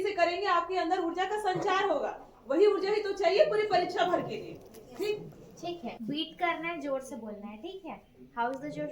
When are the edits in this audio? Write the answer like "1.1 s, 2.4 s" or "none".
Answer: 5.9 s

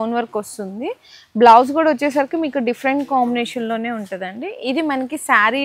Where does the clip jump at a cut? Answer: none

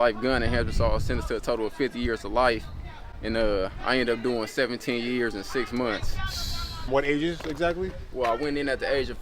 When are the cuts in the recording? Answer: none

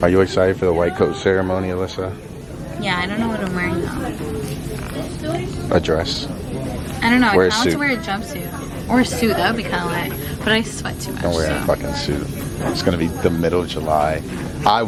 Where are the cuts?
none

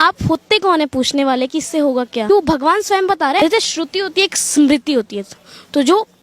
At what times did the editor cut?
2.3 s, 3.4 s

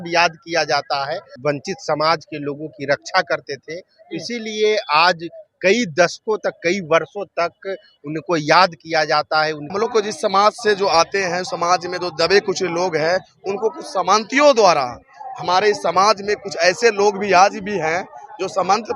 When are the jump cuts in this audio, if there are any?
1.3 s, 9.7 s

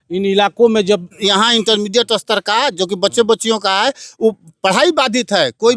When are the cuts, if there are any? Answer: 1.1 s

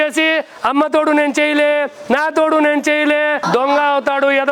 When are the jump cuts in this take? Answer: 3.4 s

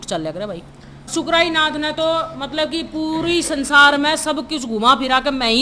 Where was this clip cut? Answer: 0.9 s

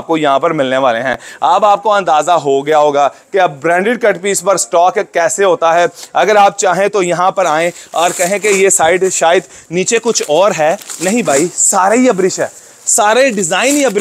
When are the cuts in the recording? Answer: none

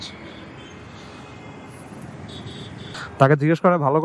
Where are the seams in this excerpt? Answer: 3.0 s

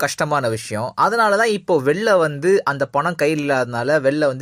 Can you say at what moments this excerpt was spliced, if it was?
2.0 s

